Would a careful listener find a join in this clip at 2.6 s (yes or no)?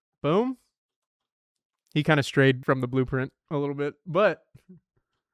yes